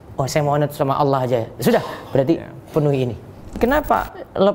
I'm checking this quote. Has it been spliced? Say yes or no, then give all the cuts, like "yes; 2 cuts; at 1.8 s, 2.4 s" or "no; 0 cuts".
yes; 1 cut; at 3.6 s